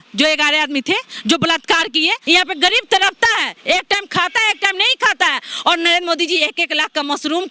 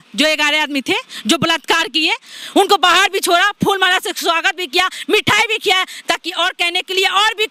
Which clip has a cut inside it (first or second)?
first